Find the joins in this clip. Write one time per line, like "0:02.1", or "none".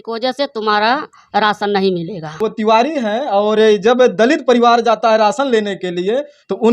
0:02.3